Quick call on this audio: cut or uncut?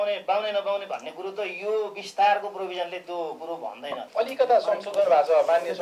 cut